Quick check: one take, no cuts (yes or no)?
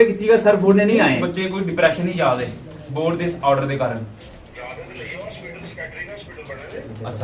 no